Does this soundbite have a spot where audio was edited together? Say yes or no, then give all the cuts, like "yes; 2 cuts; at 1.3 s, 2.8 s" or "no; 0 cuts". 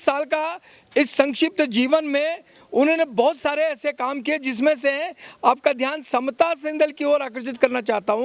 no; 0 cuts